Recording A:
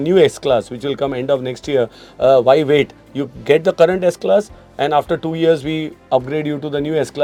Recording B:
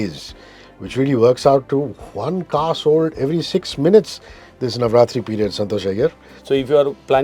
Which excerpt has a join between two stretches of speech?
B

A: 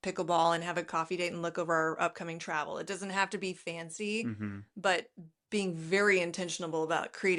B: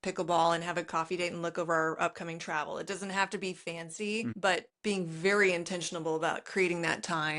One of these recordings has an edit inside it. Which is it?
B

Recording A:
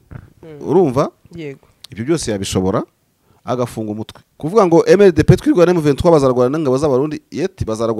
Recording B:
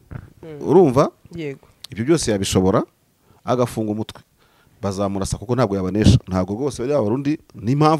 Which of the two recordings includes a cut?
A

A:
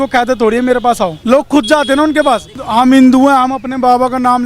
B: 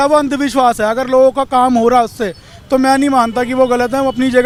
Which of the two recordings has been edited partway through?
A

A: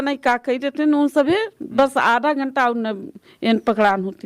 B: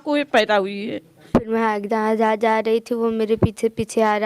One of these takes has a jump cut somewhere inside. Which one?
B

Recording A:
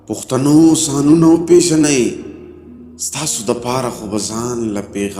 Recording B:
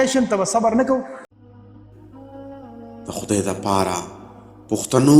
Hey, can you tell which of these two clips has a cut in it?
B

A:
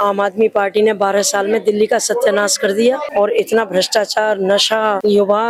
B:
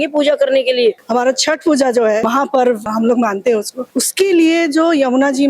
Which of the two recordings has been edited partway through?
B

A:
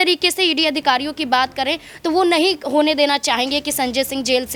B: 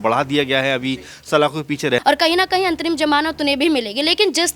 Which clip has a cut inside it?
B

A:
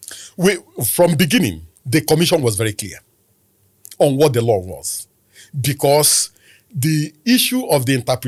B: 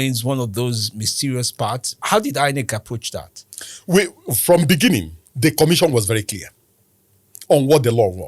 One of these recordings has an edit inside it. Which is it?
B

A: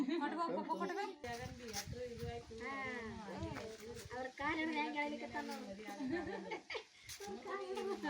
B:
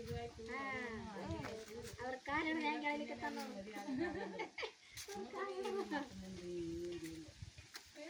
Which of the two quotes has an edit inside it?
A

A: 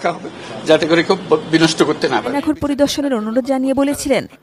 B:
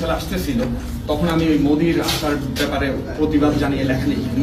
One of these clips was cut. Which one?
A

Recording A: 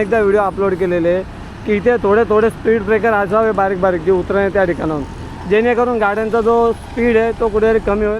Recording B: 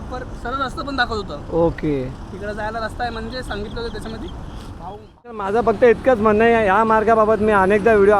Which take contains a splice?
B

